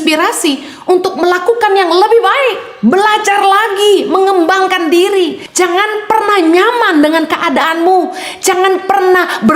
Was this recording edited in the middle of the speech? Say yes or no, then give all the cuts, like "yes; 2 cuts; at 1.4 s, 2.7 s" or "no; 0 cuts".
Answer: yes; 1 cut; at 5.4 s